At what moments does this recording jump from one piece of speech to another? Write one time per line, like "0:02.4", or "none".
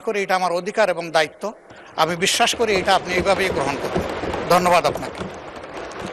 none